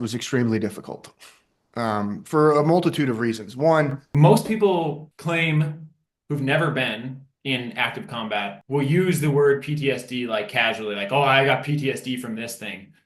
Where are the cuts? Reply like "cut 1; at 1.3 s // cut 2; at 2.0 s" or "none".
cut 1; at 4.0 s // cut 2; at 5.1 s // cut 3; at 8.6 s

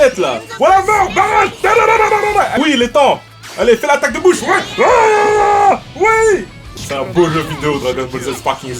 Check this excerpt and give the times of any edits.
cut 1; at 2.6 s // cut 2; at 6.7 s

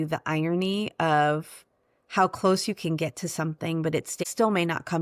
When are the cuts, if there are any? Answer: none

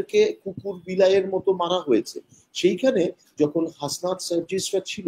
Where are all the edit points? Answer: none

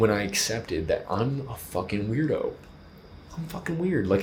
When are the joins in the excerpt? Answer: none

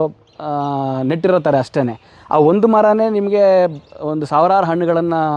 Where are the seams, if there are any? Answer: none

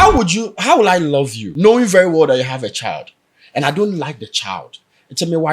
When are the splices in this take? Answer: cut 1; at 1.4 s

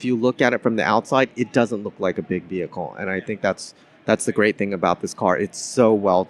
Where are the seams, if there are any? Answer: none

